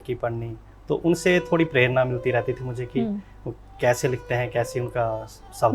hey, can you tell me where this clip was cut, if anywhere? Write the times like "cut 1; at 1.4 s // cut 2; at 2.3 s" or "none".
none